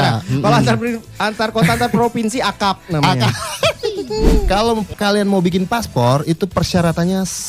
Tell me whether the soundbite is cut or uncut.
cut